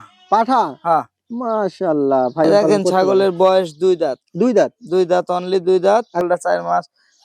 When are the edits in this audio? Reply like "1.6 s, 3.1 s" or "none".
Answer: 2.5 s, 6.2 s